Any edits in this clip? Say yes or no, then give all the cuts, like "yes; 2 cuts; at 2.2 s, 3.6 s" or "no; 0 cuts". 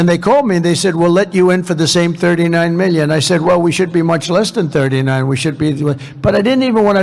no; 0 cuts